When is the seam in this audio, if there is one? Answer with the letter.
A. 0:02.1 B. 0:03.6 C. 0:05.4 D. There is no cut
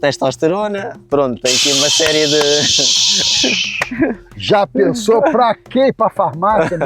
D